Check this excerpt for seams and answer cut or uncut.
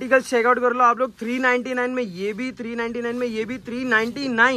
uncut